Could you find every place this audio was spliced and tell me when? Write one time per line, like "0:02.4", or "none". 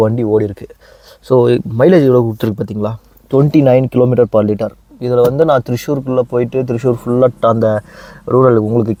none